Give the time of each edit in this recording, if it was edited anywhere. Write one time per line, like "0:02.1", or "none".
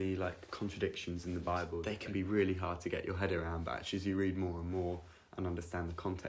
0:01.8